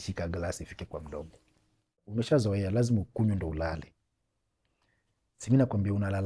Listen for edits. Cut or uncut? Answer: cut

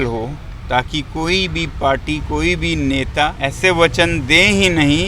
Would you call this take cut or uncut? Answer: cut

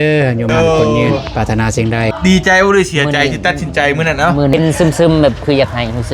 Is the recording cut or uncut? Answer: cut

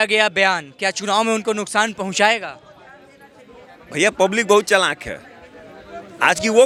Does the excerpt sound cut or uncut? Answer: uncut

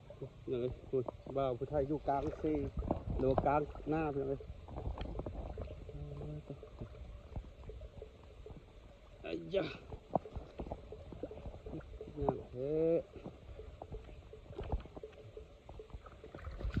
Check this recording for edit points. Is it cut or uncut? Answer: uncut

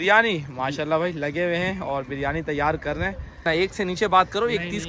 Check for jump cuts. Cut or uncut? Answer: cut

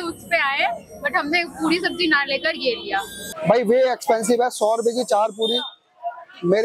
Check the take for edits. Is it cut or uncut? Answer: cut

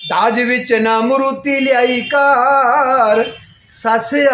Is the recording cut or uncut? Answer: uncut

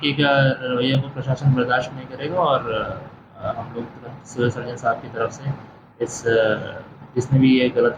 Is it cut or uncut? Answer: uncut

